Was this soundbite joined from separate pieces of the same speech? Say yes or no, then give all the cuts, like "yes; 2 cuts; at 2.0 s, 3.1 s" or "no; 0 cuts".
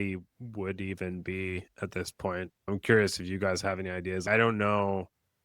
yes; 2 cuts; at 2.7 s, 4.2 s